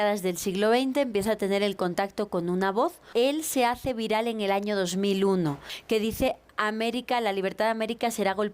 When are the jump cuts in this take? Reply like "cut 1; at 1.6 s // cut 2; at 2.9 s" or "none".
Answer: cut 1; at 3.0 s // cut 2; at 5.7 s